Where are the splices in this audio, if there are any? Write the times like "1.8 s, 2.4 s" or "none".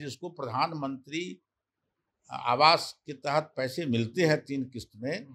none